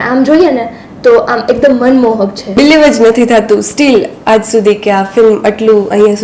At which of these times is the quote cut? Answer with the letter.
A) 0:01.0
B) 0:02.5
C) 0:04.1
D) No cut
B